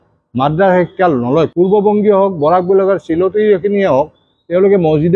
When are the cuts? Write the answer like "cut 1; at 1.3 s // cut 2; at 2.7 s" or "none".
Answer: cut 1; at 1.5 s